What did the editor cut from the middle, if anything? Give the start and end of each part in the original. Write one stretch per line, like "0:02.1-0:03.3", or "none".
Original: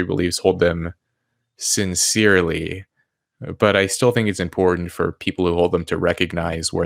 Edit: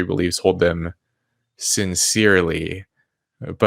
none